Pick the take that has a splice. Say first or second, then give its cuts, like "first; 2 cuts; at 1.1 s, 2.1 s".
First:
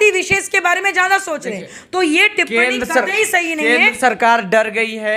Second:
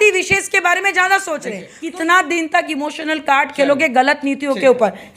second; 1 cut; at 1.7 s